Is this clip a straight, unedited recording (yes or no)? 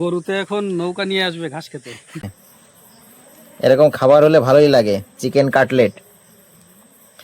no